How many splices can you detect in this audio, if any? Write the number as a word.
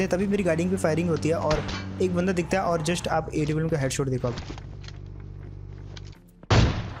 zero